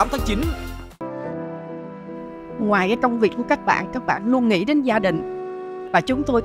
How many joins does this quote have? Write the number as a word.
one